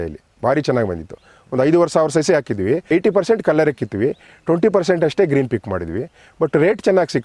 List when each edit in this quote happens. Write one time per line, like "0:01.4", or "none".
0:02.9